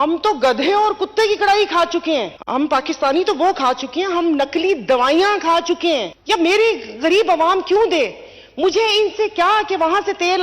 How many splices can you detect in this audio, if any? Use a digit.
2